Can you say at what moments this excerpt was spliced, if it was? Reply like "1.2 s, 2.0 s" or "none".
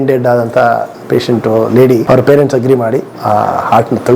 2.0 s, 3.1 s